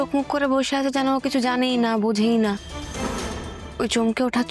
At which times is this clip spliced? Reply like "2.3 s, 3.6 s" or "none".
3.6 s